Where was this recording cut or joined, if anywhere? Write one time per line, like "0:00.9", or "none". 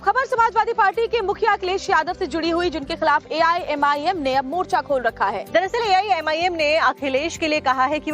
0:02.6